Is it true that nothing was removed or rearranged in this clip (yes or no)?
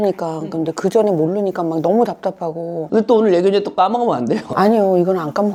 yes